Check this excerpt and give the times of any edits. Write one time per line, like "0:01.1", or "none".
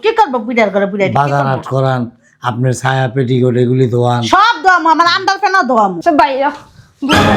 0:06.0